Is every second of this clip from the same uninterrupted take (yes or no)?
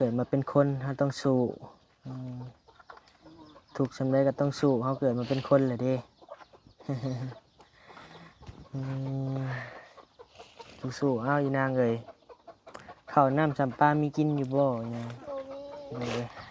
yes